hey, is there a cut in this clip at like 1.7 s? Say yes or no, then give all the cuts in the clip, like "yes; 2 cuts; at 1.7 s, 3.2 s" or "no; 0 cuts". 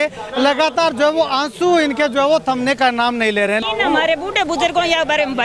no; 1 cut; at 3.6 s